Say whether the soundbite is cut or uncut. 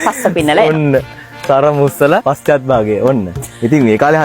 cut